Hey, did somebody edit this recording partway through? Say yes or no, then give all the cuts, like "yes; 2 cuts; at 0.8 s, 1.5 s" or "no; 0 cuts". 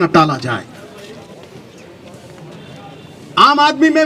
yes; 1 cut; at 1.3 s